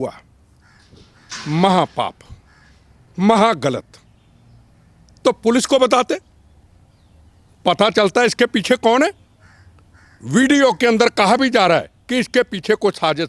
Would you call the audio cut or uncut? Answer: uncut